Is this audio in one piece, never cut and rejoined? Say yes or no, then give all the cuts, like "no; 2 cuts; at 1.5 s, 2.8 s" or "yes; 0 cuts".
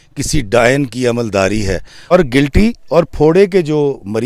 no; 1 cut; at 2.1 s